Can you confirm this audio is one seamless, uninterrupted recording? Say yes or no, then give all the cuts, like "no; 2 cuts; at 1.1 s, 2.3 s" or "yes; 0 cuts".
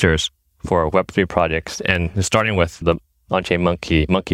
no; 1 cut; at 2.8 s